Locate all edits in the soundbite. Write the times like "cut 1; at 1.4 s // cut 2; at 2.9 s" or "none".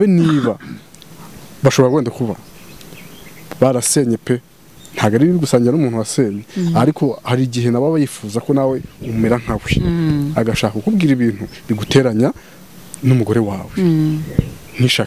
none